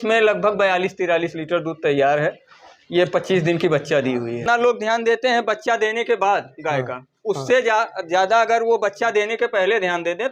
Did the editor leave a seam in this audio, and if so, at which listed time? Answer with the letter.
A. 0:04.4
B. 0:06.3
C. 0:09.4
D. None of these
A